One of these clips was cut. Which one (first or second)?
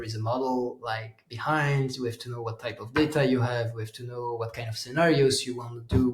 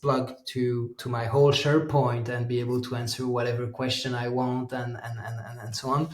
second